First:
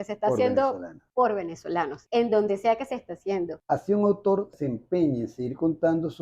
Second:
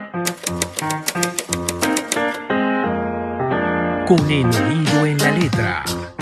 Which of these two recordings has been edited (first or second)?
first